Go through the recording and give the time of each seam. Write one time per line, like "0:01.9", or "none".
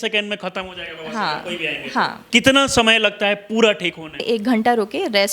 0:02.2
0:04.2